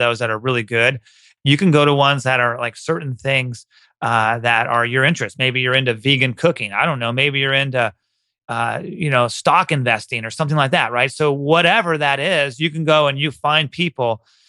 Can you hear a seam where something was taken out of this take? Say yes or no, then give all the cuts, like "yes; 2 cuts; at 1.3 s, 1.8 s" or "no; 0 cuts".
yes; 1 cut; at 1.3 s